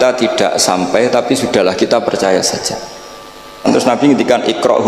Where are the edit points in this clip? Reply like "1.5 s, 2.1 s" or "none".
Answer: 3.7 s